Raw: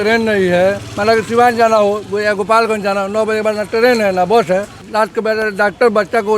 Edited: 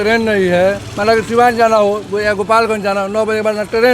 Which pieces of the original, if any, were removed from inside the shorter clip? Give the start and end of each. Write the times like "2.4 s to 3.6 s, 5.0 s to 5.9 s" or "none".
none